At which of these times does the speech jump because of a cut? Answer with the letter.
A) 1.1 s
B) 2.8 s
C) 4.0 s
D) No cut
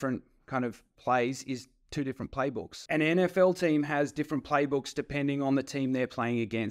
B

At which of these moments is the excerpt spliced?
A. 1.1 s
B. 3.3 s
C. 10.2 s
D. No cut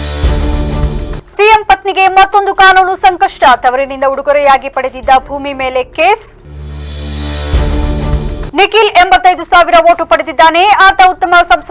A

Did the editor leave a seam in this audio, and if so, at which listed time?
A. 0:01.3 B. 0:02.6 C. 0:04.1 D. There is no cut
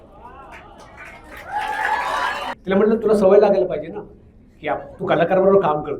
B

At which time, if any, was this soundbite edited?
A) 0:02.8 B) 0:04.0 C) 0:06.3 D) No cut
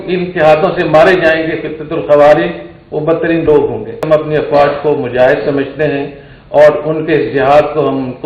B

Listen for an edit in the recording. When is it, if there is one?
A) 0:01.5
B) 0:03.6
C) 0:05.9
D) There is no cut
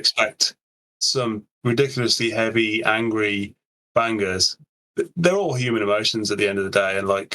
A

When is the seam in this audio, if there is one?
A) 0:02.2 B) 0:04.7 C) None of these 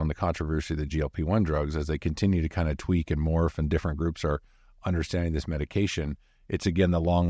C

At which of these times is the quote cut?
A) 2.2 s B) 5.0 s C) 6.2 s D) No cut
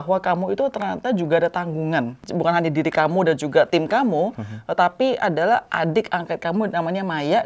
A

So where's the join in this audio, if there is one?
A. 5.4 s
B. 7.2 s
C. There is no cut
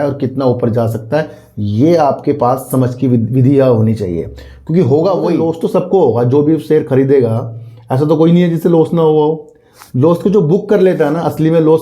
A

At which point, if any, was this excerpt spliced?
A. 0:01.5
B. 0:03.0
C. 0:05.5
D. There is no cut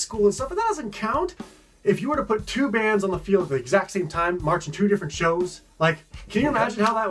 A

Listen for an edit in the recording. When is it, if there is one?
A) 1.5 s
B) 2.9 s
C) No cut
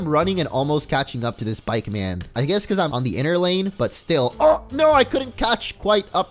B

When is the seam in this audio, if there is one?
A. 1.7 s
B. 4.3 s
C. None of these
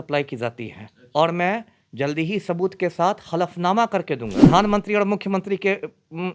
B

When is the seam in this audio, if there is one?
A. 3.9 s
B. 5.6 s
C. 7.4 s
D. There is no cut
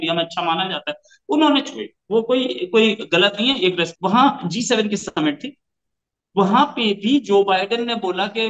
A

